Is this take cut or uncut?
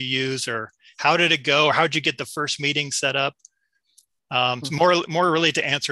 uncut